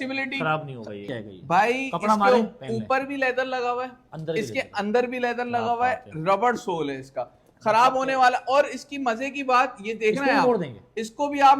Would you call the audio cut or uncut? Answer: cut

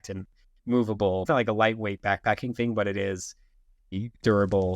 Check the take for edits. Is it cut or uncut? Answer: cut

